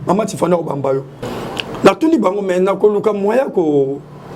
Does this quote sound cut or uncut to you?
cut